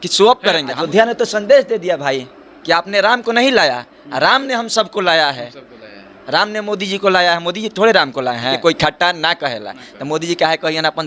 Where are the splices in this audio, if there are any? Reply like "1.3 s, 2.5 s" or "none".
0.8 s, 8.6 s